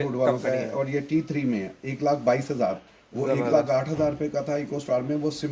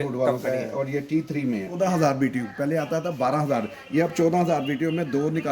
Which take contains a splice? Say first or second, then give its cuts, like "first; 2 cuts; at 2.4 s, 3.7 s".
second; 1 cut; at 1.8 s